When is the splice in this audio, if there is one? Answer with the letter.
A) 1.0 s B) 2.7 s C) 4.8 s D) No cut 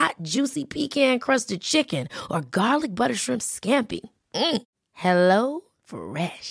D